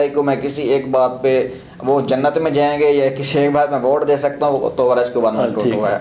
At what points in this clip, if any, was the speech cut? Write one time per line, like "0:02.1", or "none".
none